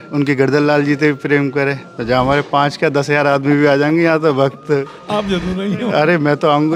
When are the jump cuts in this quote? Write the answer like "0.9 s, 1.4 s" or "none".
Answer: none